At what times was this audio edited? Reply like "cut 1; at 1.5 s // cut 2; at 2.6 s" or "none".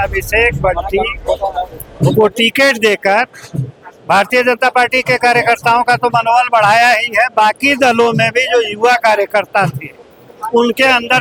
none